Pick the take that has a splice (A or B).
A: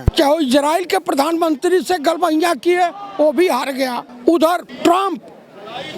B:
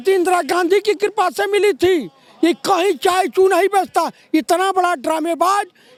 A